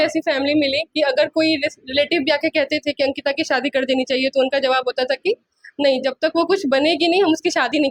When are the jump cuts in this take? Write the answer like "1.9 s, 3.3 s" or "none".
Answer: none